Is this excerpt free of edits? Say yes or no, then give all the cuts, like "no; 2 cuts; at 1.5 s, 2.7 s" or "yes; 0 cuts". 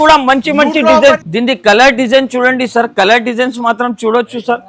no; 1 cut; at 1.3 s